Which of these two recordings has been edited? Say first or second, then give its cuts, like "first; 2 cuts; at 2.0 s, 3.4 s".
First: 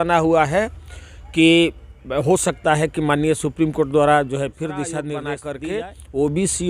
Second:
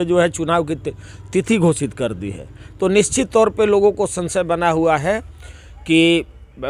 first; 1 cut; at 5.4 s